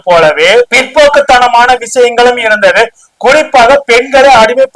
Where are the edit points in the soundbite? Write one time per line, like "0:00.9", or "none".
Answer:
none